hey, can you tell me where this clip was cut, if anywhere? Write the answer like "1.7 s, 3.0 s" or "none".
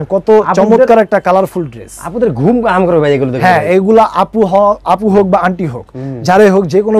none